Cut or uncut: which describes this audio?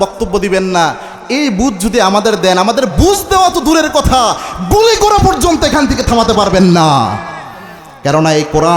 uncut